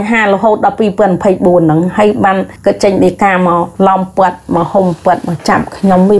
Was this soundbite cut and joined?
yes; 2 cuts; at 2.5 s, 3.7 s

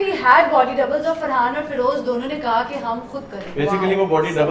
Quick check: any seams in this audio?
no; 0 cuts

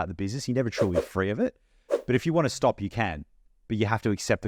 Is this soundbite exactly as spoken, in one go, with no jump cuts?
yes; 0 cuts

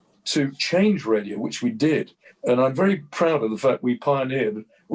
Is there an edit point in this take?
no; 0 cuts

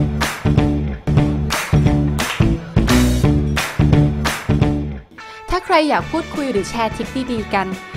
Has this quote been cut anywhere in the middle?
yes; 2 cuts; at 1.1 s, 5.0 s

